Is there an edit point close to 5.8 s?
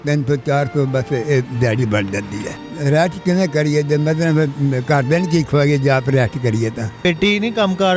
no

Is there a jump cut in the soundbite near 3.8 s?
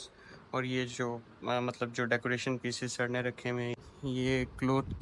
yes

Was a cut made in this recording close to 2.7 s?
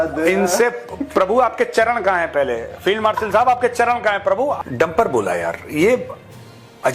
no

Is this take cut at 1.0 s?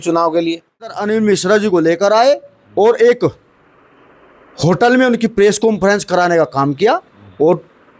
yes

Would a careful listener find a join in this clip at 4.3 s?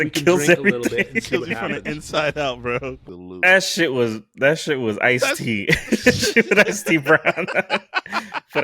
no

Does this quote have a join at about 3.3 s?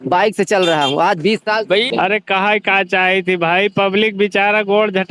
no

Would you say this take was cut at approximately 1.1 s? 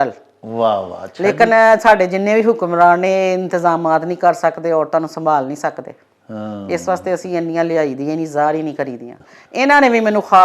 no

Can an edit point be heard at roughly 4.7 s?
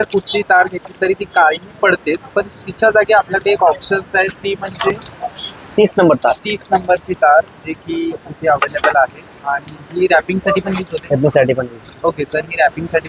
no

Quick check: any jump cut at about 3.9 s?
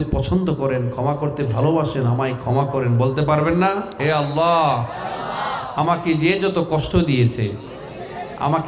yes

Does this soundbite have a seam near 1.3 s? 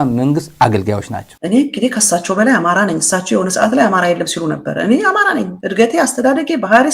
yes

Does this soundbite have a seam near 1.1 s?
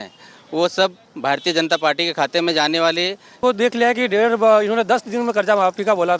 no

